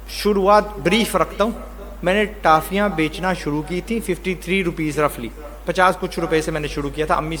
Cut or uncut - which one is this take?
uncut